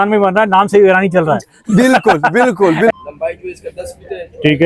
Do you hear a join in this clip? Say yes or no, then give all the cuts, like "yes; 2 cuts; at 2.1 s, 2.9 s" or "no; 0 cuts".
yes; 1 cut; at 2.9 s